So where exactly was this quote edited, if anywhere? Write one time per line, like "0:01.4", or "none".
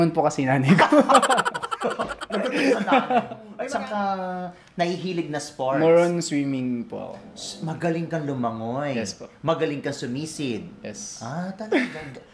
0:03.5